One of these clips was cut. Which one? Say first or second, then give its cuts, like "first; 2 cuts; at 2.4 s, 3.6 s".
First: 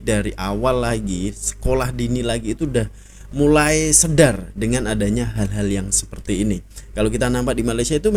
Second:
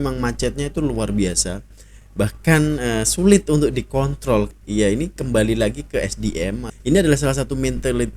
second; 2 cuts; at 4.5 s, 6.7 s